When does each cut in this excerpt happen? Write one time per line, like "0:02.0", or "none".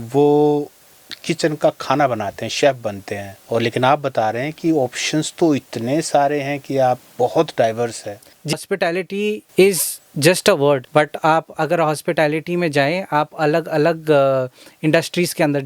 0:08.5